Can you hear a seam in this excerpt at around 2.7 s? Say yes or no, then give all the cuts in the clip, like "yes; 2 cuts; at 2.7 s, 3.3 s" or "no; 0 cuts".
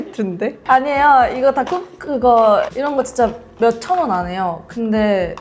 yes; 1 cut; at 2.7 s